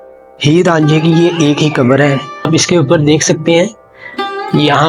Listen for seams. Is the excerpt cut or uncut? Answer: cut